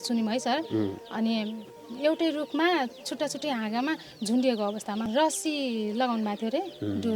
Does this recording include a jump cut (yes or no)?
yes